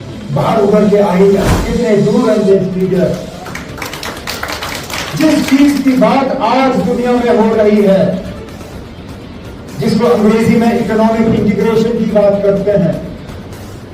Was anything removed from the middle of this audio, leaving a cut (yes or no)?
yes